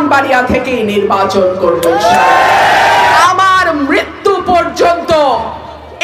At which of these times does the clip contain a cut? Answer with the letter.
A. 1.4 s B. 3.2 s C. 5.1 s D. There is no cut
B